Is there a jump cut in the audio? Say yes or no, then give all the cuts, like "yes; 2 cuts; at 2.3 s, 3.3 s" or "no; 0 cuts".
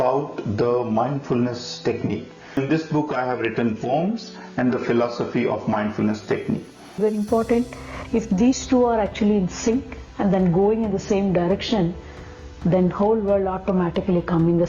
yes; 2 cuts; at 2.6 s, 7.0 s